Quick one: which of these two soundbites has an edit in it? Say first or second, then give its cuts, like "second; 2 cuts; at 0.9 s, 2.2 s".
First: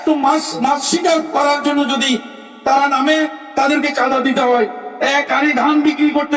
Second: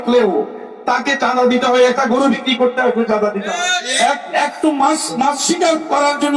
second; 1 cut; at 3.5 s